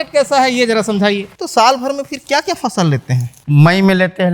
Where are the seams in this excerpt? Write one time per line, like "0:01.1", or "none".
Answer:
0:01.4
0:03.3